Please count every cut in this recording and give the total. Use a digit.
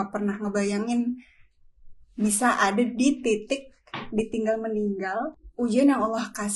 1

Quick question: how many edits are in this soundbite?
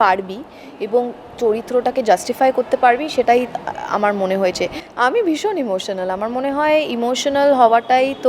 1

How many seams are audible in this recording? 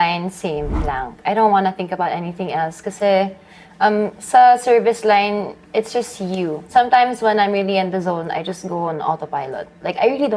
1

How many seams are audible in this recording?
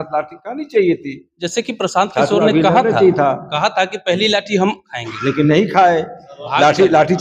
0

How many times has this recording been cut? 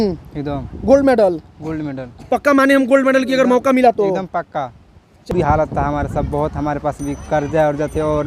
1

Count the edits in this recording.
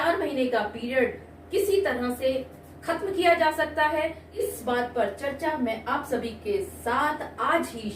1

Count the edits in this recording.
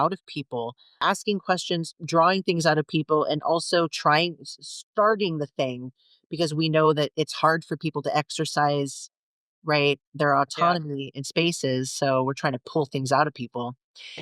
1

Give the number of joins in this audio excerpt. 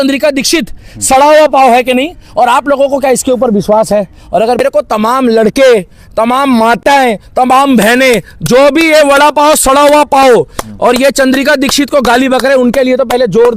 1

